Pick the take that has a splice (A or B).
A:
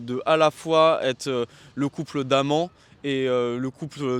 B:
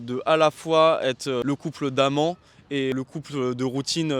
B